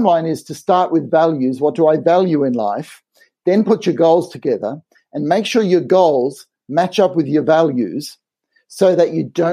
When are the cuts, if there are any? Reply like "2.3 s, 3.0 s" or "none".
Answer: none

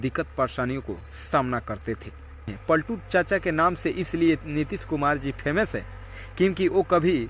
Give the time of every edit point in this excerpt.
2.6 s

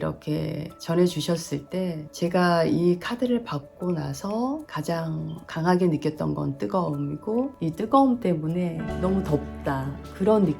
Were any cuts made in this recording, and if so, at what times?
2.1 s

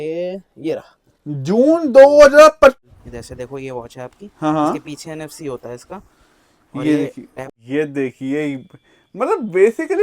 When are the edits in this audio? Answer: 2.8 s, 7.5 s

